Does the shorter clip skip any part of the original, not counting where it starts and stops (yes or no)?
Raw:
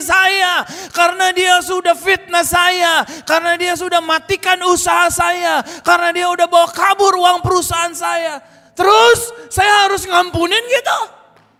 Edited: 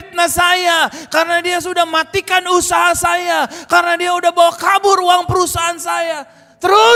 no